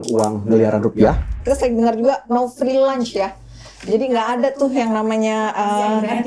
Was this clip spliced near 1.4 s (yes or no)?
yes